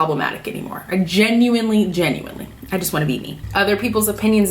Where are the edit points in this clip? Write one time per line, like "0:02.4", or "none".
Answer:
0:03.4